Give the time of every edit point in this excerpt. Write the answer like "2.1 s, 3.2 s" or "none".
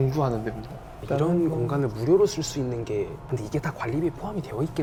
none

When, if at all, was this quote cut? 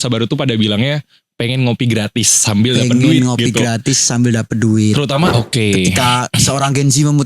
5.3 s

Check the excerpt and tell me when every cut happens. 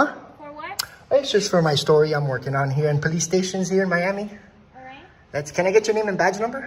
none

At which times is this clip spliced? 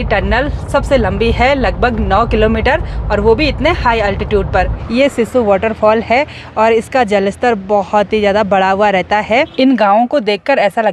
4.8 s, 9.5 s

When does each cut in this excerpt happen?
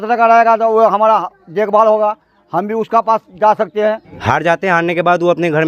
4.1 s

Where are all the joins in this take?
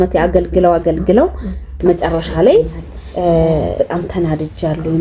3.7 s

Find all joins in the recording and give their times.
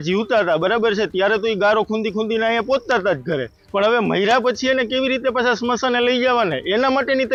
none

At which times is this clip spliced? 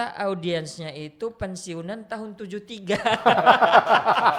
none

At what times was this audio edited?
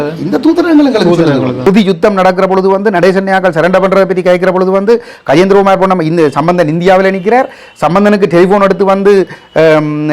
1.7 s

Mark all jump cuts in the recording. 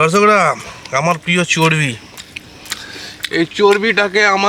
none

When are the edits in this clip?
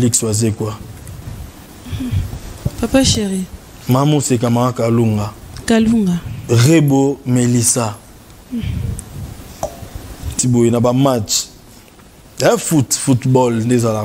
10.3 s

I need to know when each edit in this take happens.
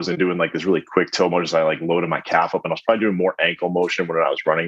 none

